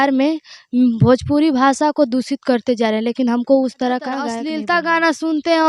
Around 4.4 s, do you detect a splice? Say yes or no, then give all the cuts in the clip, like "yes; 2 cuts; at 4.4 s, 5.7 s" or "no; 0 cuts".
yes; 1 cut; at 4.4 s